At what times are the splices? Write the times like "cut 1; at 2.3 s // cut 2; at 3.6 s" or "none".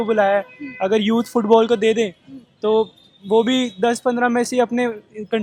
none